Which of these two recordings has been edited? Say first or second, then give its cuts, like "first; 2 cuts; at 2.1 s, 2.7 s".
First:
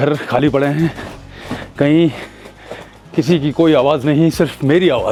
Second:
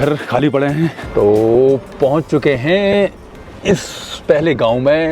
second; 1 cut; at 1.0 s